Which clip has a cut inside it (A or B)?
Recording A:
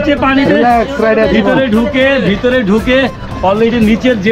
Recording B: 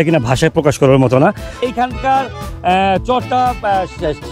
B